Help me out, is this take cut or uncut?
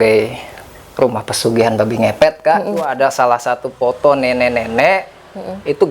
cut